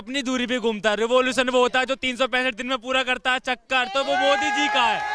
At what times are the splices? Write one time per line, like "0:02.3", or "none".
none